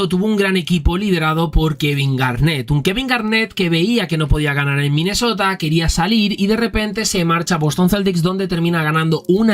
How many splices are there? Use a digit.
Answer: 0